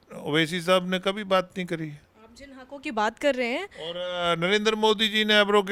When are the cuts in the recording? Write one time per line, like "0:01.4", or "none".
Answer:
none